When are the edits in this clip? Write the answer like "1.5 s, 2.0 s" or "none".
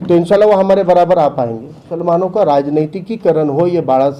1.9 s